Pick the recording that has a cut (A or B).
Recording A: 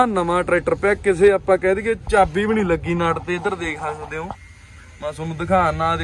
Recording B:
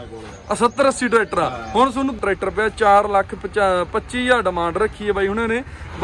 B